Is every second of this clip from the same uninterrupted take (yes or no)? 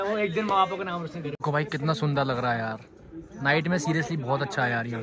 no